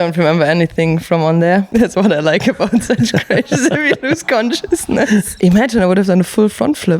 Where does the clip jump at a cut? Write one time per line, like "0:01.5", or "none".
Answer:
0:01.7
0:05.3